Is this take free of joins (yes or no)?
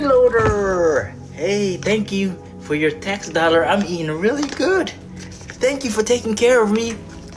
yes